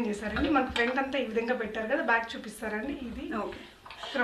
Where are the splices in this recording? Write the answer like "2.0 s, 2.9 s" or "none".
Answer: none